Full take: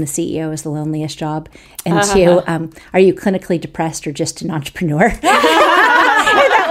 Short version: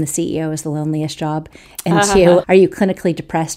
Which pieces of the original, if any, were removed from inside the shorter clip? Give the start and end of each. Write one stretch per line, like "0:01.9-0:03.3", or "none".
0:02.4-0:02.9